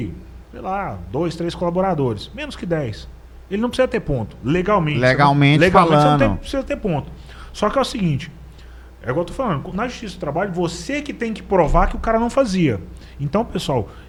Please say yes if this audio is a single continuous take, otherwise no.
yes